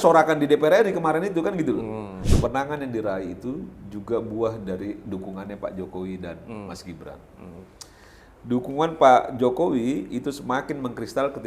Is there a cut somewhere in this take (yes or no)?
yes